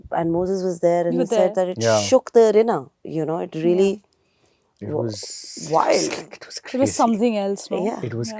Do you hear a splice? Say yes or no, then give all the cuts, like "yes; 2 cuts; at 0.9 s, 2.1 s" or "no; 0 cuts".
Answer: no; 0 cuts